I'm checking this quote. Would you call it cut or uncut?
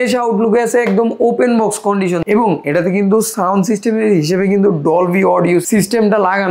cut